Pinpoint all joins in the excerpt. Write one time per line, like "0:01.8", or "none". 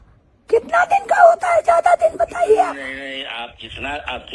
none